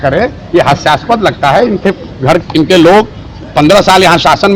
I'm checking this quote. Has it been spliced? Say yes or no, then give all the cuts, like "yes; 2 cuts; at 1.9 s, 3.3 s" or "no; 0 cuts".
no; 0 cuts